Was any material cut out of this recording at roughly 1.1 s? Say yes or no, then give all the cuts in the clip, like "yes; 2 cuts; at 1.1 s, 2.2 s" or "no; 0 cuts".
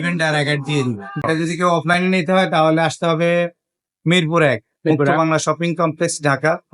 yes; 1 cut; at 1.1 s